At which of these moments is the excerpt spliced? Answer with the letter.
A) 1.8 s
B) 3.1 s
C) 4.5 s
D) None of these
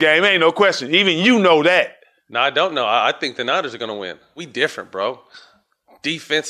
C